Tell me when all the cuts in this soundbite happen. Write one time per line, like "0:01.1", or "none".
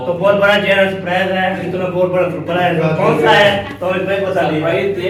none